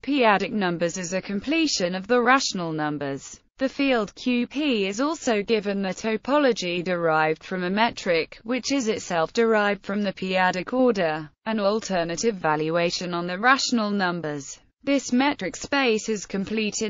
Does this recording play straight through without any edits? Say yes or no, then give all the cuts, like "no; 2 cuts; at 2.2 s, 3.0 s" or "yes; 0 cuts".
no; 1 cut; at 13.4 s